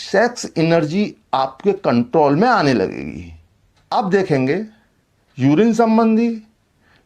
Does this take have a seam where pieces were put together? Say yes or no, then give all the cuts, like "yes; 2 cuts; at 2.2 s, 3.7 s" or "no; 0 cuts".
yes; 1 cut; at 3.9 s